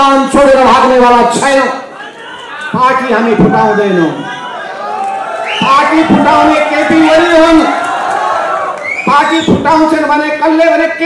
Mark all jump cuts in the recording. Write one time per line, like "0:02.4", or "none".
none